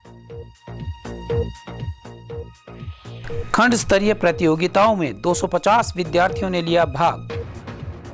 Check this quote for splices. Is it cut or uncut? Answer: uncut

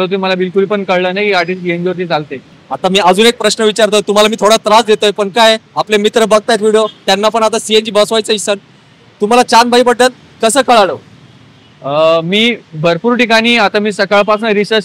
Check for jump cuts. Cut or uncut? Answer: uncut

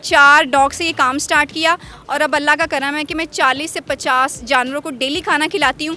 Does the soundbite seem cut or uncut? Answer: uncut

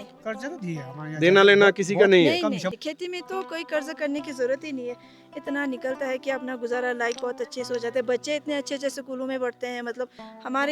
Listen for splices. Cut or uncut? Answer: cut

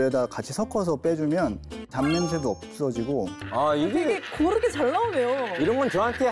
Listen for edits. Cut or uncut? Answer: cut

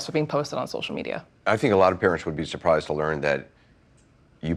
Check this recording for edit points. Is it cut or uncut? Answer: uncut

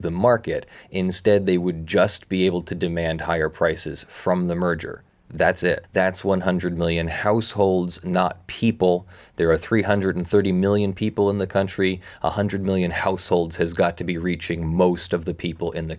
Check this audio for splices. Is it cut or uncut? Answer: cut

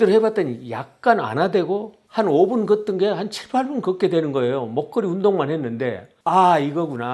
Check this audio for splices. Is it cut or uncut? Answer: uncut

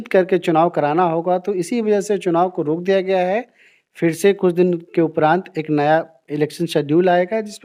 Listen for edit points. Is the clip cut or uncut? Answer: uncut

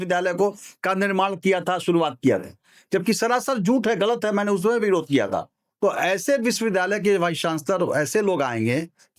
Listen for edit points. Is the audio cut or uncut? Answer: uncut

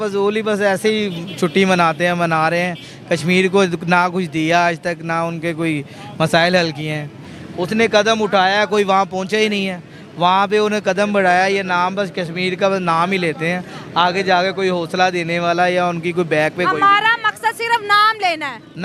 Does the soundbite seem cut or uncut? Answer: uncut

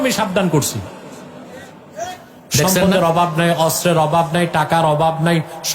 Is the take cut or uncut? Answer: cut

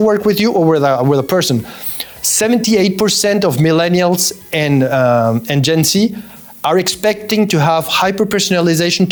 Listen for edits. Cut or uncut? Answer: uncut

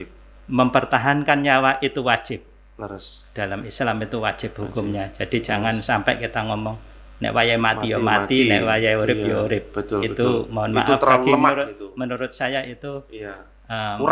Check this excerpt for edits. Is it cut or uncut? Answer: uncut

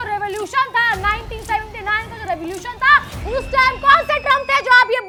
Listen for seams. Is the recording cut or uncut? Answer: uncut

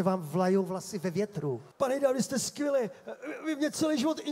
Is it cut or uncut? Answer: cut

